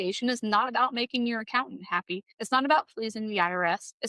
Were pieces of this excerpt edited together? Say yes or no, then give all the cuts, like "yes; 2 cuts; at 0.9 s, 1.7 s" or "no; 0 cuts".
yes; 1 cut; at 2.3 s